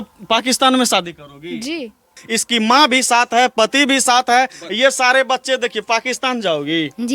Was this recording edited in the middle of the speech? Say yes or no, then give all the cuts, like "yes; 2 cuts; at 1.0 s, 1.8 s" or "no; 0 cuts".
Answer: yes; 1 cut; at 2.2 s